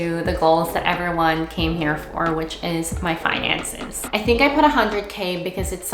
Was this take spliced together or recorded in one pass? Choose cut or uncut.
cut